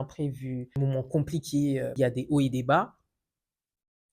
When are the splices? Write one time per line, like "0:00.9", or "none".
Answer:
0:00.8
0:01.9